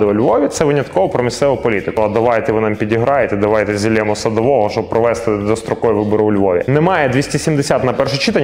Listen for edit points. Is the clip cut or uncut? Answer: cut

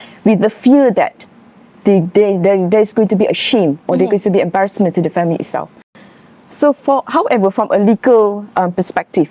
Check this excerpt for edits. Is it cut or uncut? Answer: uncut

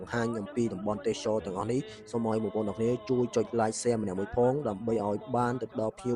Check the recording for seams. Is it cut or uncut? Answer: uncut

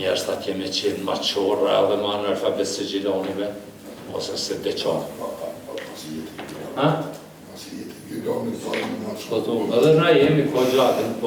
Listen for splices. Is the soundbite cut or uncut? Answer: uncut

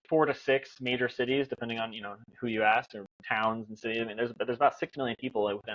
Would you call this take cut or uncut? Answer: uncut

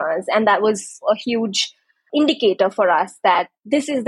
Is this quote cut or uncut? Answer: cut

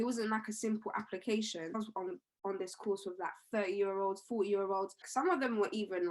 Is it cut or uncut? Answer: cut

